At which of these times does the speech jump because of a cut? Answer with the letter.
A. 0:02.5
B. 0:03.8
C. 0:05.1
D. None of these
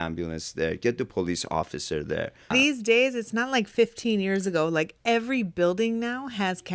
A